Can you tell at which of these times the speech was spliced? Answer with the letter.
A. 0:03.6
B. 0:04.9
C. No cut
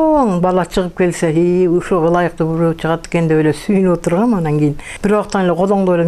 B